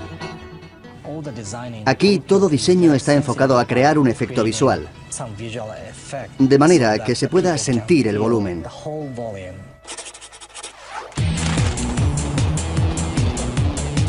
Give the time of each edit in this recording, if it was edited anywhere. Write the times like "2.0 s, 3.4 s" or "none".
none